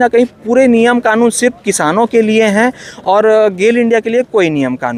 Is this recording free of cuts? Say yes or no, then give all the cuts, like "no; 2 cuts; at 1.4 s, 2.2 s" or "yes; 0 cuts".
yes; 0 cuts